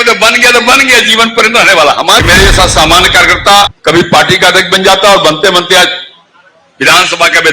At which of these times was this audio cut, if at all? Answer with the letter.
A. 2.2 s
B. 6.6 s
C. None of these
A